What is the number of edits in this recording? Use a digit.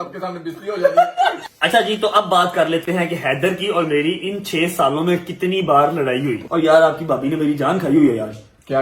2